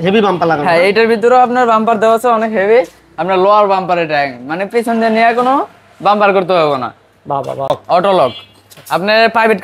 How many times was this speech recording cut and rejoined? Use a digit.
1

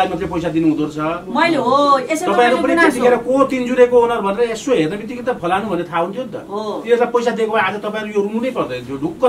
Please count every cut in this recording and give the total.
0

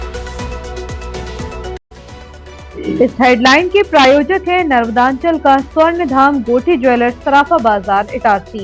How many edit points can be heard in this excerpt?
1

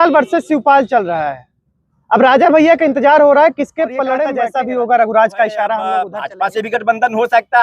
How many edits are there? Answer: 2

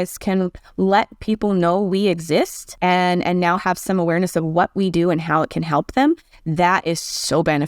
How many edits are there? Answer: 1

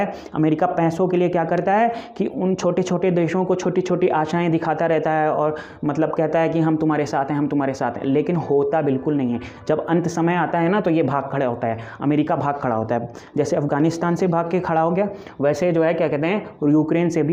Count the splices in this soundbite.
0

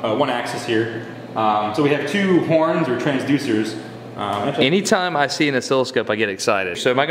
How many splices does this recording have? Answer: 0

